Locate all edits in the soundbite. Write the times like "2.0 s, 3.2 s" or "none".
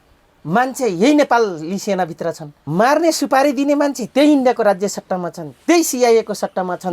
2.5 s